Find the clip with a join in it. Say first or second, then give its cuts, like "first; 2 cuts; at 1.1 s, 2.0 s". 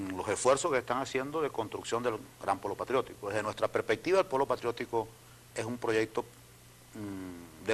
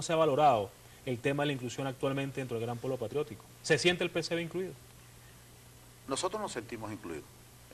second; 1 cut; at 1.1 s